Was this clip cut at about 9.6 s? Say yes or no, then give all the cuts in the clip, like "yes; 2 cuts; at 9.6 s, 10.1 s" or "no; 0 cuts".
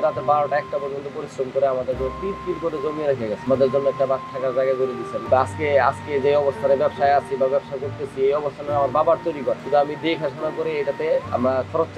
yes; 3 cuts; at 3.4 s, 5.1 s, 9.6 s